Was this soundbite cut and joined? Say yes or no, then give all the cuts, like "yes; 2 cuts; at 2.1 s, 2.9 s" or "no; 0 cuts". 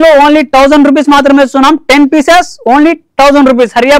no; 0 cuts